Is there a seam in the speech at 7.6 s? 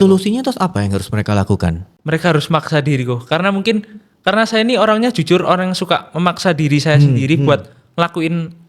no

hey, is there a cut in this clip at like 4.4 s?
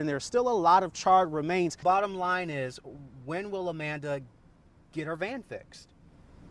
no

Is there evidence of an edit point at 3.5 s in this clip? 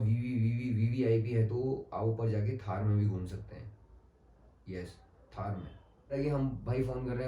no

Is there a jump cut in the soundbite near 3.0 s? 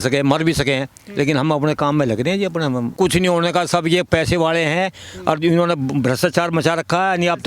yes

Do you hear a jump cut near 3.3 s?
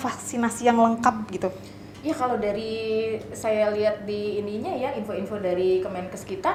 no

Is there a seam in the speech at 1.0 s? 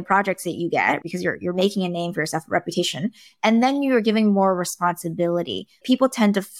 yes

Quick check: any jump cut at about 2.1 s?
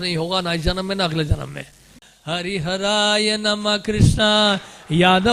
yes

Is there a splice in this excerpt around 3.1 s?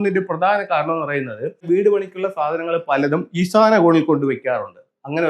no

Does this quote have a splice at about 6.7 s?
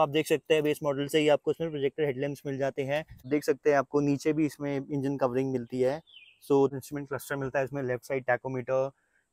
yes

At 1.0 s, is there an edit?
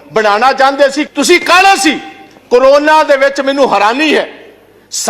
yes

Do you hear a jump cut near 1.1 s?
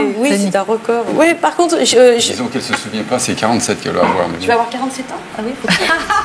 yes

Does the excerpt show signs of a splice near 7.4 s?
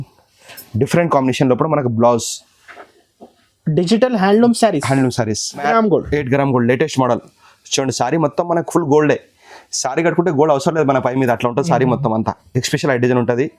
no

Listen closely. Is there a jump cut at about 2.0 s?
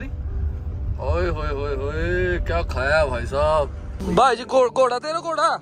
no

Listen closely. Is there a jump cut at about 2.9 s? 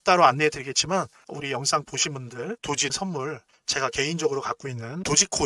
yes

